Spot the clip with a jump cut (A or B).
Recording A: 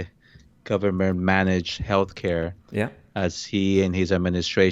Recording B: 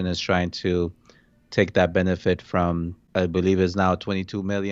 B